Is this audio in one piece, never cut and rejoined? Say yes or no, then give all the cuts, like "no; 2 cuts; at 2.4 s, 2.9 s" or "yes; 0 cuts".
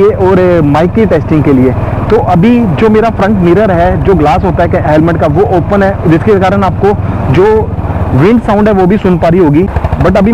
yes; 0 cuts